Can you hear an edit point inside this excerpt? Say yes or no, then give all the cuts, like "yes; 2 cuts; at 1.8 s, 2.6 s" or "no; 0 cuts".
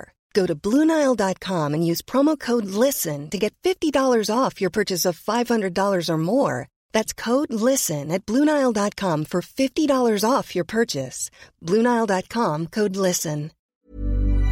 yes; 1 cut; at 13.6 s